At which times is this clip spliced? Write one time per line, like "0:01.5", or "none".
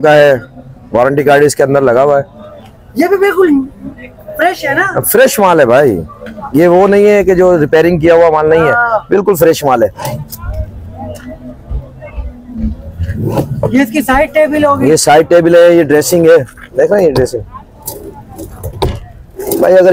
none

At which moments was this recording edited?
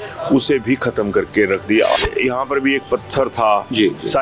0:02.0

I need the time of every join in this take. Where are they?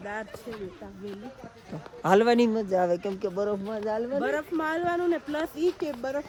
none

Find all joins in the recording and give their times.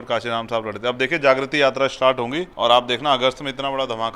0:02.4

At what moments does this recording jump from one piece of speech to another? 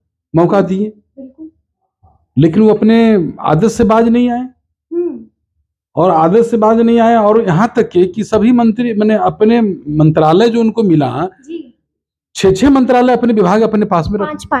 none

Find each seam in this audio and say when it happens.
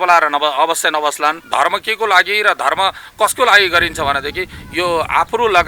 0:01.4

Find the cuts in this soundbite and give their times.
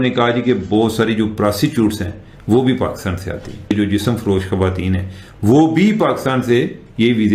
0:03.7

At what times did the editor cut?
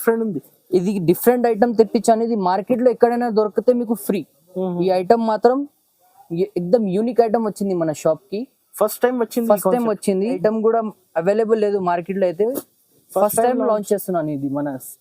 0:10.4

